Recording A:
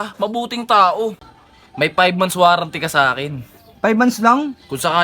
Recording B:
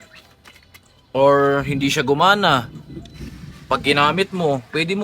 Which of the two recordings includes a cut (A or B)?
A